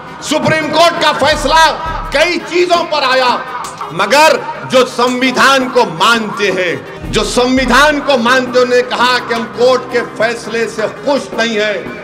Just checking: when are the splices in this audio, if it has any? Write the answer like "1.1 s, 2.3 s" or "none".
3.8 s, 6.9 s

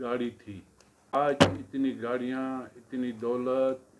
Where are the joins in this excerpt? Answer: 1.1 s

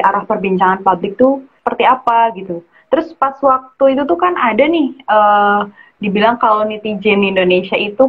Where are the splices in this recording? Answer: 1.6 s

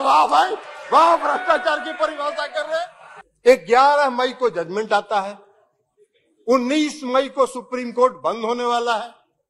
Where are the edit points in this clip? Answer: 3.1 s

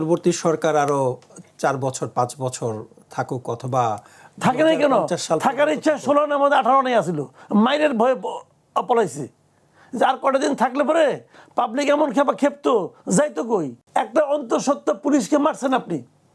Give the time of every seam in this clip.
13.8 s

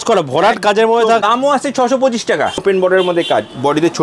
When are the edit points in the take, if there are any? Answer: 1.2 s, 2.6 s

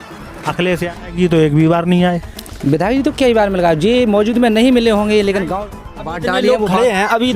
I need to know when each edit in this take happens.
0.9 s, 6.0 s

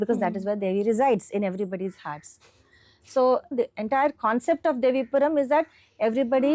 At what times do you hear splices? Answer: 3.5 s

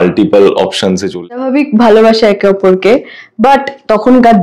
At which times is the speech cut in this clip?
1.2 s

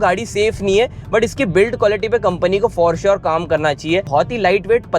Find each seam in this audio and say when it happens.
4.1 s

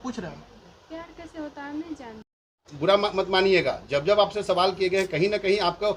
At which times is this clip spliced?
2.6 s

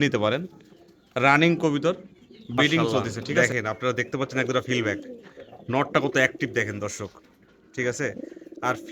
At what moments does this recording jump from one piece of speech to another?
3.4 s

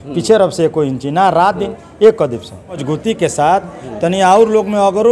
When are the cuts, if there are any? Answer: 2.8 s

